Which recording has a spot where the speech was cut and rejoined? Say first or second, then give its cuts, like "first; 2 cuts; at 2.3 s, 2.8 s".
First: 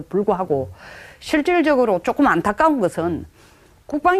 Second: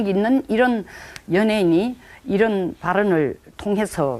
second; 1 cut; at 2.8 s